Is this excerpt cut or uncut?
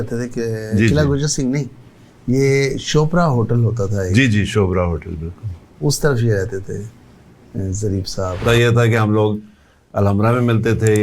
uncut